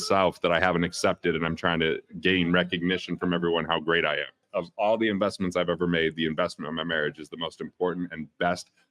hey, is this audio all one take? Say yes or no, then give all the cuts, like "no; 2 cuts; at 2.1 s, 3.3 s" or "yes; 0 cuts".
no; 1 cut; at 4.4 s